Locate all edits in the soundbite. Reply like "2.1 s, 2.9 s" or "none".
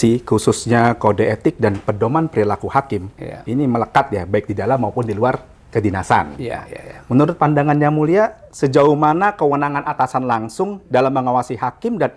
none